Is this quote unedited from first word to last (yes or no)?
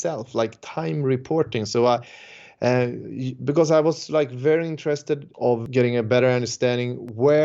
no